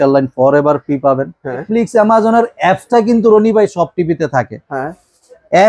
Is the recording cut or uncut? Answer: cut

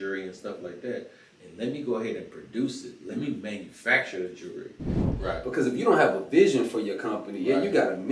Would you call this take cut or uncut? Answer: cut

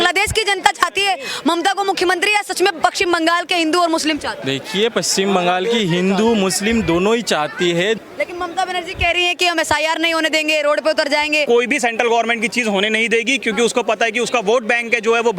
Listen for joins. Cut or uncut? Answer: cut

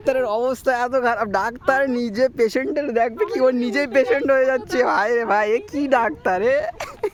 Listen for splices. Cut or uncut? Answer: uncut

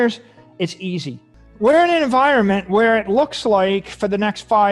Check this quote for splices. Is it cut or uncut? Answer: cut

